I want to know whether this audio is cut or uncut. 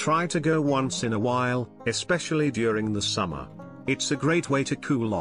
uncut